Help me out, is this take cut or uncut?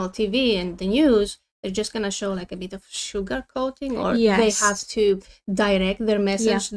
uncut